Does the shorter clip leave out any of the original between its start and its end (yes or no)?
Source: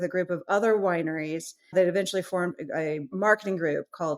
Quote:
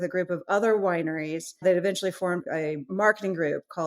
yes